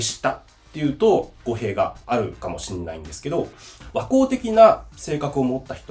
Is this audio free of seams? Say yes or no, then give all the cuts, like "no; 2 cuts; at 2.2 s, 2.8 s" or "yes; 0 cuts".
no; 1 cut; at 1.9 s